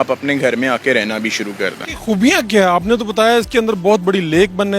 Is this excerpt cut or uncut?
cut